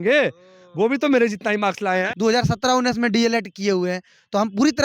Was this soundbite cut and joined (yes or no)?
yes